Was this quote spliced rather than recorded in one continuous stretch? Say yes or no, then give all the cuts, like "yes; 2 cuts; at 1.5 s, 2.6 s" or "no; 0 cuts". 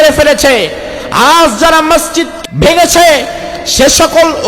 yes; 1 cut; at 2.3 s